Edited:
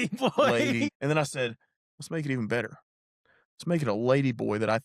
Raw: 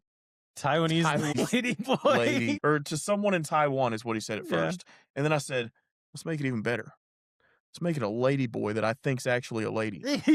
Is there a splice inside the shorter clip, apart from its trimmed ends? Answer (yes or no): yes